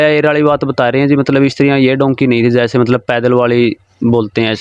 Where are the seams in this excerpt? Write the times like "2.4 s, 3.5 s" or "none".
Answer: none

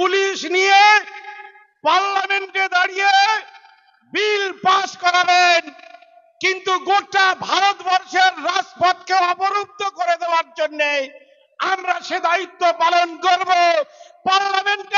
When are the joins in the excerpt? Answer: none

